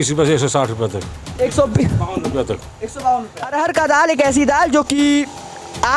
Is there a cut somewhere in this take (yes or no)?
yes